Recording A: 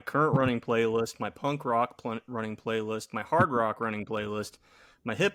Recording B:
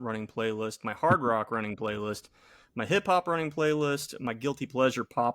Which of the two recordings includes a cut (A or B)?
B